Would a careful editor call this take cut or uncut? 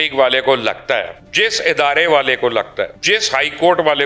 cut